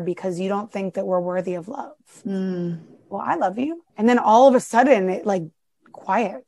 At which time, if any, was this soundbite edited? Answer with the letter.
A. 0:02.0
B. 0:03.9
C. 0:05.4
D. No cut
B